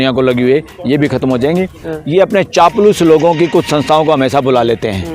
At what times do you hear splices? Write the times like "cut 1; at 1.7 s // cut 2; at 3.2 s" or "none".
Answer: cut 1; at 1.8 s